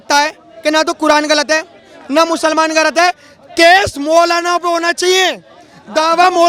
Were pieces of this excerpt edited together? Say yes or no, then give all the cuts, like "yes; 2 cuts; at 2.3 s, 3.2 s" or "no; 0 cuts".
no; 0 cuts